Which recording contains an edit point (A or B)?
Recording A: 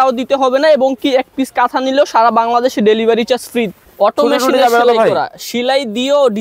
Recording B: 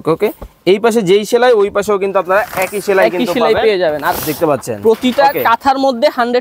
A